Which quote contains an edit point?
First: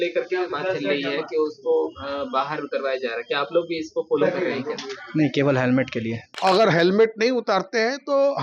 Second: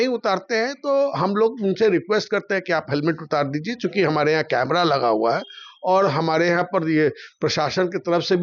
first; 1 cut; at 6.2 s

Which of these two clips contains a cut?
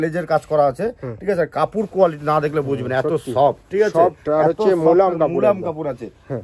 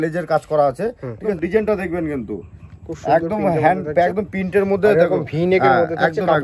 second; 1 cut; at 1.3 s

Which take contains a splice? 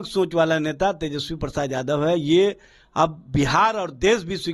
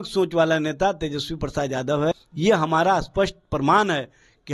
second; 1 cut; at 2.1 s

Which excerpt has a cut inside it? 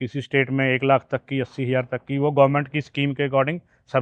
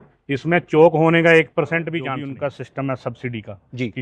second; 1 cut; at 2.2 s

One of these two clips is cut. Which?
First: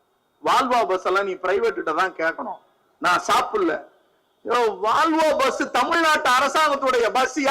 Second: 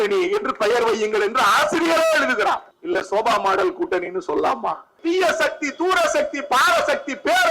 second; 2 cuts; at 2.7 s, 4.9 s

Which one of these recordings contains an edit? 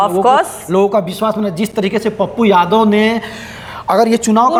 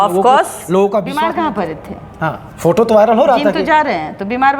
second; 1 cut; at 1.1 s

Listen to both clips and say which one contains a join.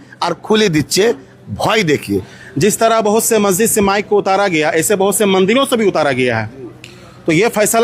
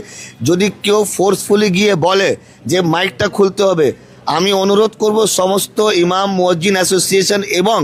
first; 1 cut; at 2.4 s

